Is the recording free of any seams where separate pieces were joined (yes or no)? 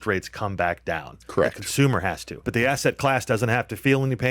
no